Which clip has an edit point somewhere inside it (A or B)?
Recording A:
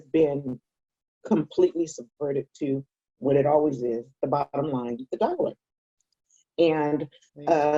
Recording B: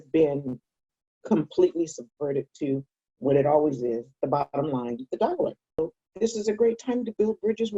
B